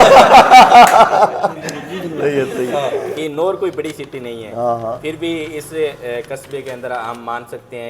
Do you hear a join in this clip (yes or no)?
yes